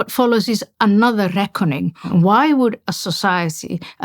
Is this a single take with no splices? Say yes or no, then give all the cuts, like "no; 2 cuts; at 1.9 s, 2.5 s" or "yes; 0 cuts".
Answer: no; 1 cut; at 2.1 s